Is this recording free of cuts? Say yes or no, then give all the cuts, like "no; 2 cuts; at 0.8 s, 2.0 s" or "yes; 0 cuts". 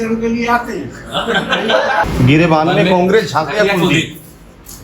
no; 1 cut; at 2.0 s